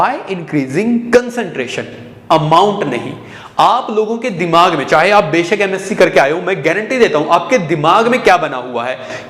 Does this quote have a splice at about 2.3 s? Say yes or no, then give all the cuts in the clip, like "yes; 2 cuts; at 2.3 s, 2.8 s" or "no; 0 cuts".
no; 0 cuts